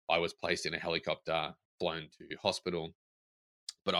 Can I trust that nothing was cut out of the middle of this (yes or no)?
yes